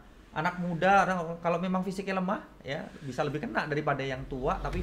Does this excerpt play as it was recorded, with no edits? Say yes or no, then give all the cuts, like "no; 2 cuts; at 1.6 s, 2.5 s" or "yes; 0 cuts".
yes; 0 cuts